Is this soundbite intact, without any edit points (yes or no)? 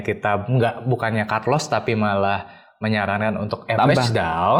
yes